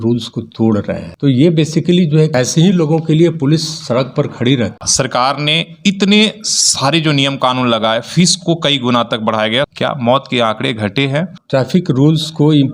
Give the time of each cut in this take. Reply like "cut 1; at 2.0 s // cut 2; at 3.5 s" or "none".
cut 1; at 1.0 s // cut 2; at 2.3 s // cut 3; at 4.8 s // cut 4; at 9.7 s // cut 5; at 11.4 s